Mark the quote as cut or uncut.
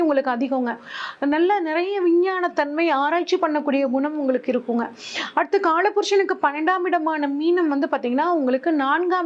uncut